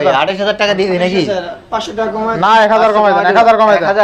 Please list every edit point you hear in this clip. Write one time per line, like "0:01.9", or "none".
none